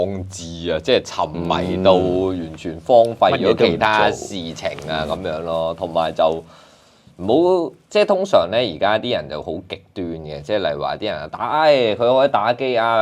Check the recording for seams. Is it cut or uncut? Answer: uncut